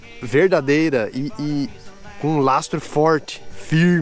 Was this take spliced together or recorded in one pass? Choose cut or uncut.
uncut